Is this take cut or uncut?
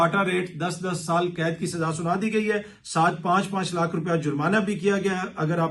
uncut